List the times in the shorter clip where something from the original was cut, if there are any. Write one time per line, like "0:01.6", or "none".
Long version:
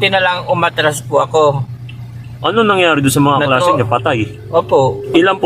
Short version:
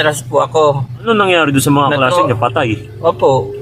0:01.0